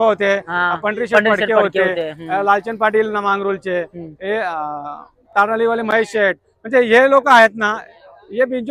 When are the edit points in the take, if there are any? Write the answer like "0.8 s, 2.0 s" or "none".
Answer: none